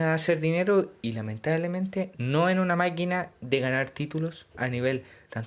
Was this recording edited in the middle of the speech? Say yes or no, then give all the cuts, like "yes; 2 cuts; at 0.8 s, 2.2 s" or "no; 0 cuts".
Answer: no; 0 cuts